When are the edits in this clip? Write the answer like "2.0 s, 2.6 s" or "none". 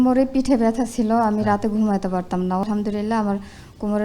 2.6 s